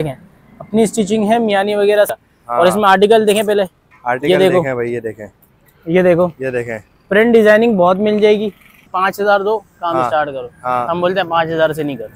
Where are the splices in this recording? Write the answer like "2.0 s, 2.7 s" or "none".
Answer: 2.2 s, 8.9 s